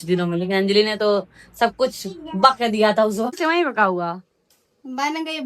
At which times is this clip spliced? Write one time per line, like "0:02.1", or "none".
0:03.4